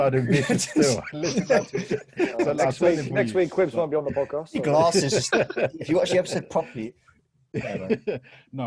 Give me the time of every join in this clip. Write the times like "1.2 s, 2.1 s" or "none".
none